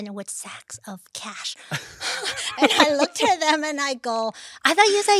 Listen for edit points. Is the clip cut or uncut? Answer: uncut